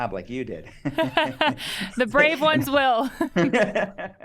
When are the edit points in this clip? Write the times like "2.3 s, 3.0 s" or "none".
3.3 s